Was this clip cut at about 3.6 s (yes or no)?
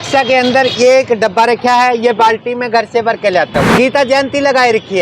yes